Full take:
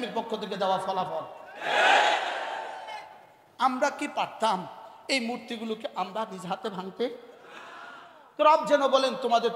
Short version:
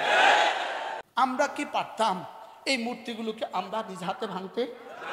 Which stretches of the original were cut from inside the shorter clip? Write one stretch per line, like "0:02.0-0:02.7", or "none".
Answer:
0:02.7-0:03.4